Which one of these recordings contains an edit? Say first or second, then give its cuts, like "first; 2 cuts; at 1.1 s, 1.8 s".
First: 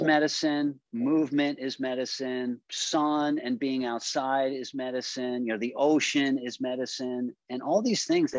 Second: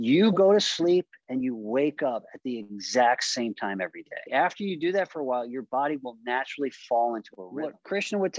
second; 2 cuts; at 4.3 s, 7.4 s